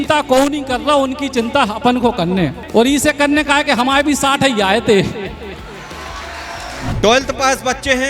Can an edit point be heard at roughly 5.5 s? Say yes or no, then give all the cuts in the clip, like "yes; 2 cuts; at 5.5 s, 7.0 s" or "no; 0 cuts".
no; 2 cuts; at 2.6 s, 6.8 s